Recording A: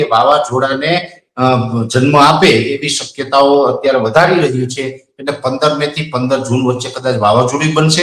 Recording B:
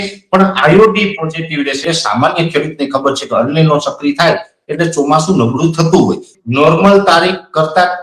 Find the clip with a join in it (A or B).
B